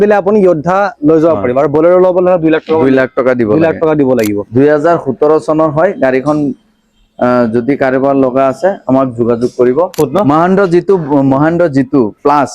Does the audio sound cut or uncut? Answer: cut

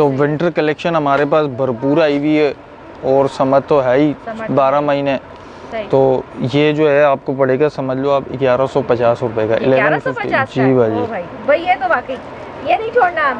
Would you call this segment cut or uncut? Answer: uncut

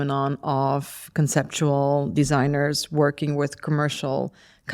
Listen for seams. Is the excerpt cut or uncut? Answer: uncut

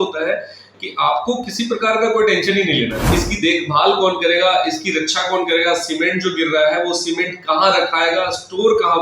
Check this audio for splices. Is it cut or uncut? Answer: cut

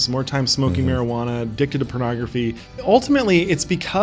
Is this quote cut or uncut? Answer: cut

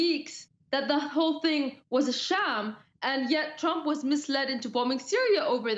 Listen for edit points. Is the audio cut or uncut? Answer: uncut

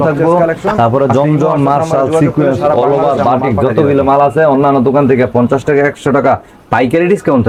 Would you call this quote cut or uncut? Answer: uncut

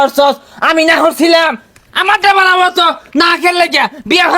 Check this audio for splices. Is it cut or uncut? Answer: uncut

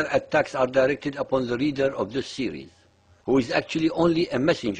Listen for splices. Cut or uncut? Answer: uncut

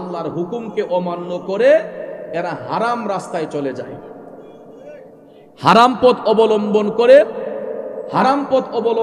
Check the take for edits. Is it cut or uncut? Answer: uncut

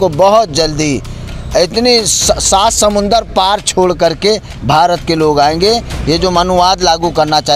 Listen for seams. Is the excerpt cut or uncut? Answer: uncut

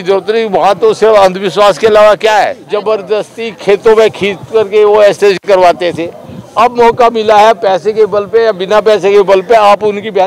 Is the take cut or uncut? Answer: cut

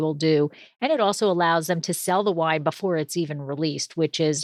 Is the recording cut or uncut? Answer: uncut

